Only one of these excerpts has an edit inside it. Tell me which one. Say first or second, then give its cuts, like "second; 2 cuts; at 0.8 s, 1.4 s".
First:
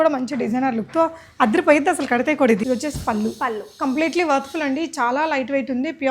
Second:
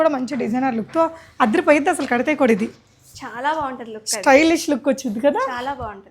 first; 1 cut; at 2.6 s